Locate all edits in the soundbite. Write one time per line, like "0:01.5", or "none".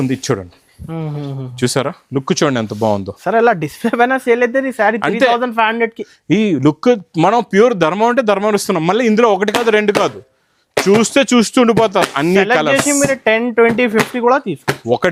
none